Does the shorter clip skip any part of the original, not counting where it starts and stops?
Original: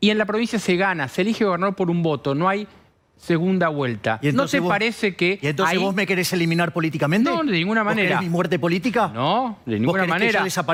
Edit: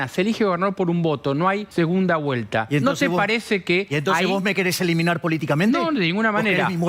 yes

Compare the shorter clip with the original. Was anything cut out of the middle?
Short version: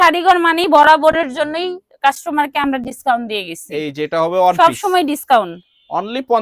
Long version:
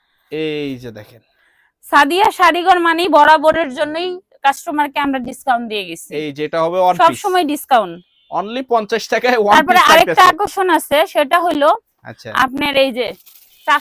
no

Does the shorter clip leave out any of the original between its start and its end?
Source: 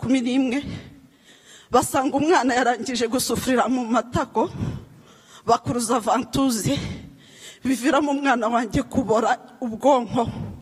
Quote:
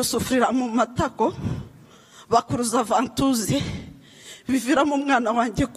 no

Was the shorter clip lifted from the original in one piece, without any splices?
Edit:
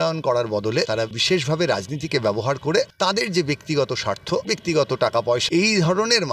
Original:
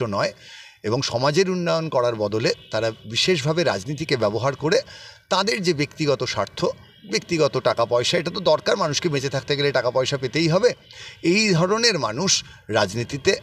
no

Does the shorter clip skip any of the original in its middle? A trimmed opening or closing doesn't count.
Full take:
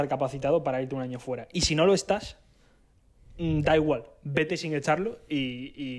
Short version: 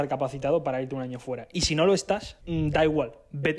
yes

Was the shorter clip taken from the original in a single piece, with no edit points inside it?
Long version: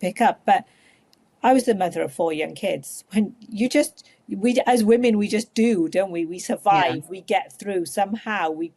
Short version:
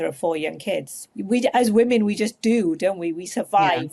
no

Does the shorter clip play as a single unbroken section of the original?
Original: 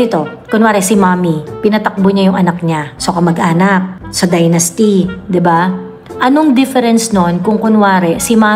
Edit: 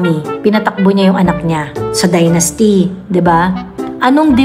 no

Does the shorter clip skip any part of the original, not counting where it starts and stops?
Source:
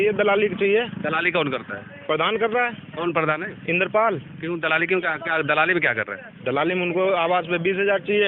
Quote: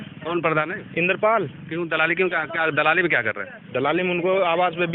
no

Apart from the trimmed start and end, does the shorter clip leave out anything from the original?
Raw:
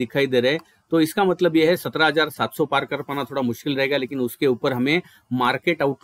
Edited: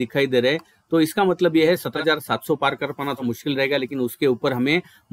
yes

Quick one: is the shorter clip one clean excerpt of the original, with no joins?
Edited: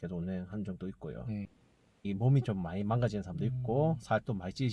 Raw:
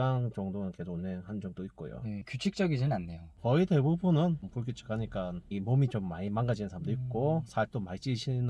no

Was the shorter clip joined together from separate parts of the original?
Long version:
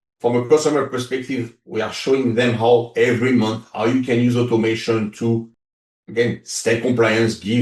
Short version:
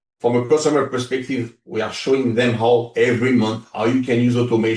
no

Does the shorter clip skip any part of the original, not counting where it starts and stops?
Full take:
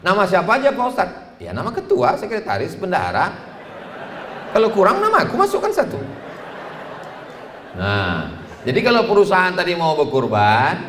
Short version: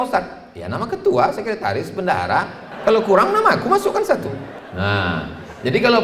yes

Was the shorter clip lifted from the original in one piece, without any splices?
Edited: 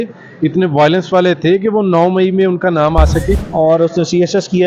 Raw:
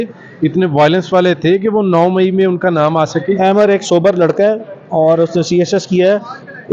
no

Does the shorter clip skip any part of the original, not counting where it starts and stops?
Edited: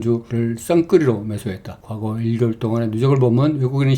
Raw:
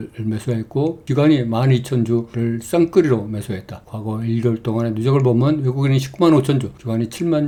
no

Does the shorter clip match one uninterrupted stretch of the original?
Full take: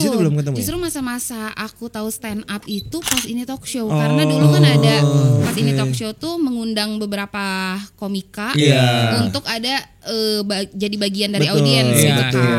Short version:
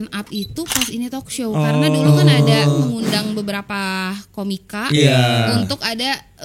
no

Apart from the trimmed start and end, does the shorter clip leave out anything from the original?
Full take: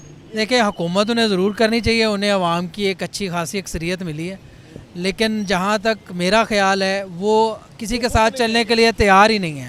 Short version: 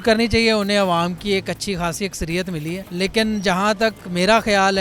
yes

